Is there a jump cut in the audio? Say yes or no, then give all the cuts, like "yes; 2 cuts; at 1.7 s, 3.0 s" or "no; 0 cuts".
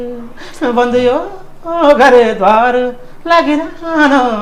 no; 0 cuts